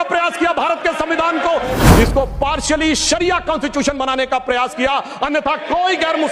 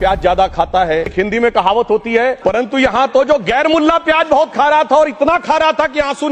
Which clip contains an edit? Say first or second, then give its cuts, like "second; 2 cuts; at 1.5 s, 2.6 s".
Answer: first; 1 cut; at 1.7 s